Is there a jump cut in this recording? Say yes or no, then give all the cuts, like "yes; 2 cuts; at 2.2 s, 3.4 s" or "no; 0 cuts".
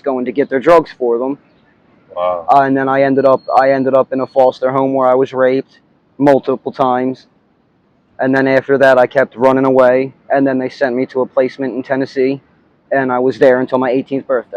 no; 0 cuts